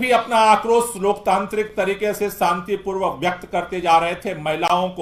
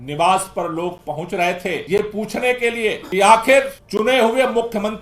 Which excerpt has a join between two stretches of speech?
second; 3 cuts; at 1.8 s, 3.0 s, 3.8 s

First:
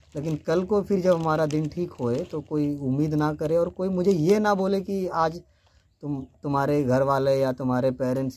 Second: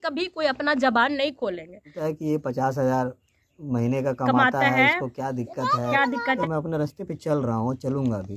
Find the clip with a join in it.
second; 2 cuts; at 2.0 s, 6.4 s

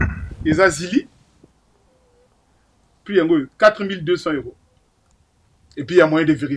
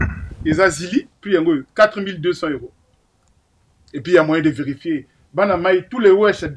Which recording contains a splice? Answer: second; 1 cut; at 1.1 s

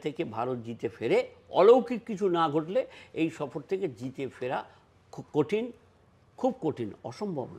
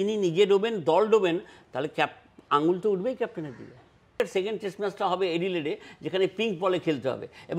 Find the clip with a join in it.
second; 1 cut; at 4.2 s

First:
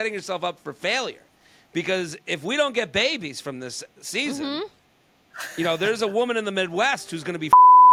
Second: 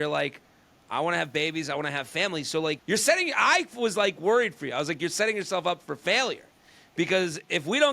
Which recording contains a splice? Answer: second; 1 cut; at 2.8 s

